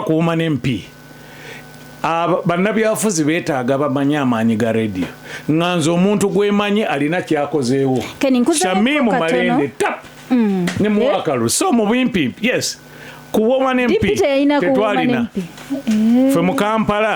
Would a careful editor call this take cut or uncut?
uncut